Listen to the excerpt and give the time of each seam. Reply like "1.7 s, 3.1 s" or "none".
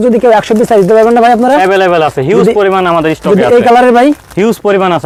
none